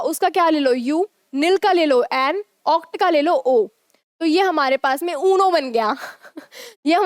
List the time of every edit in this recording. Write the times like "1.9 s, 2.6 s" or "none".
none